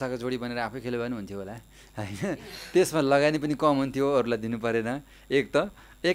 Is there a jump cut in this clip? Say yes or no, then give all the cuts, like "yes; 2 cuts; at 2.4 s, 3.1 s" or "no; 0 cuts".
no; 0 cuts